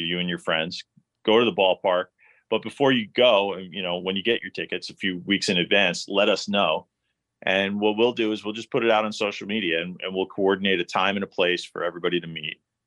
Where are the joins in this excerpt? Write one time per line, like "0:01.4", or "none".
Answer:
none